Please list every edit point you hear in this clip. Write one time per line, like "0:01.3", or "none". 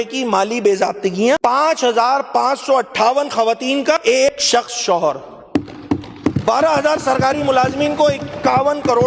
0:01.4
0:04.2